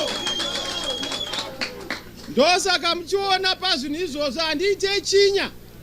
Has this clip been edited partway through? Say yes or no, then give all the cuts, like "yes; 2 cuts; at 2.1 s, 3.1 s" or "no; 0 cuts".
no; 0 cuts